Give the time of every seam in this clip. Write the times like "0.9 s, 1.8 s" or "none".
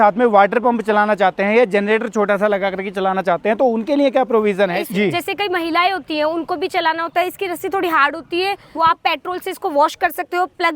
4.9 s, 8.6 s